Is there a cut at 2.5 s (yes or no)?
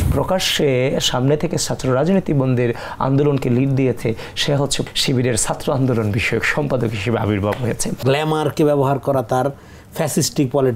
no